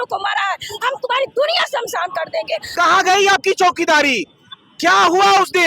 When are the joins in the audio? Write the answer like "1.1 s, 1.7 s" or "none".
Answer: 2.7 s